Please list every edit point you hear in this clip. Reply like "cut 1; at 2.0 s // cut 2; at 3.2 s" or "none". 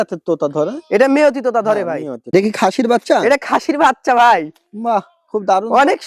cut 1; at 2.2 s

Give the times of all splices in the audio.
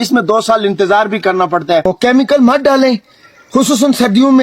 cut 1; at 1.9 s

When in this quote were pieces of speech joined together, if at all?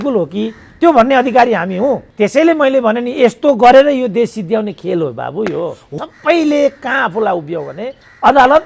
cut 1; at 2.1 s // cut 2; at 5.8 s

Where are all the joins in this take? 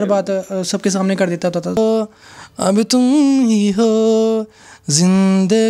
cut 1; at 1.7 s

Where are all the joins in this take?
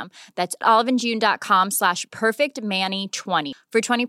none

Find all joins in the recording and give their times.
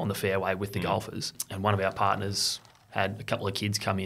cut 1; at 1.4 s

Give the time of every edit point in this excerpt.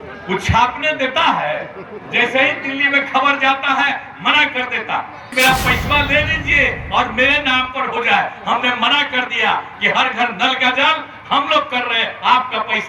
cut 1; at 5.2 s

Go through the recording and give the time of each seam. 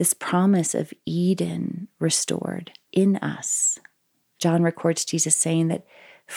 cut 1; at 2.8 s

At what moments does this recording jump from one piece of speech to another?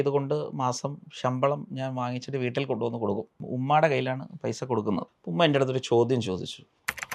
cut 1; at 3.4 s // cut 2; at 5.2 s

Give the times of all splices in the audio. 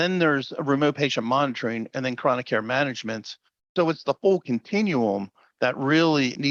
none

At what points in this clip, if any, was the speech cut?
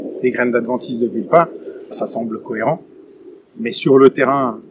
cut 1; at 1.9 s

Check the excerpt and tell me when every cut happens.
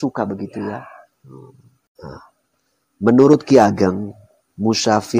cut 1; at 2.0 s

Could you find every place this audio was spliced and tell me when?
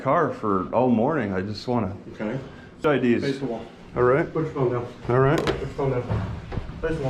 cut 1; at 2.8 s

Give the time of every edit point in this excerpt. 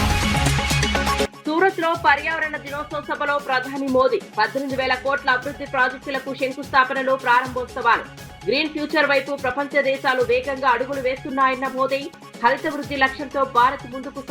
cut 1; at 1.2 s

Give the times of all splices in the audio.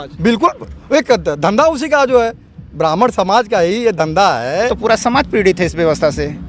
cut 1; at 4.7 s

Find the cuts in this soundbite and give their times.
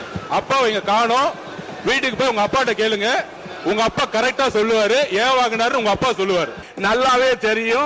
cut 1; at 6.6 s

